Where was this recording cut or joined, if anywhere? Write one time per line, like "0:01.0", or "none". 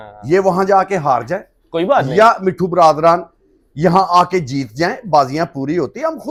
none